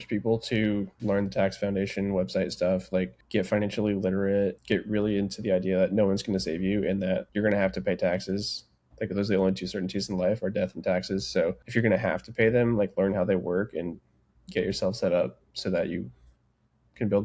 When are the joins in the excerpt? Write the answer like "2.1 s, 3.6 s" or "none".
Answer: 0.9 s, 3.2 s, 4.6 s, 7.3 s, 11.6 s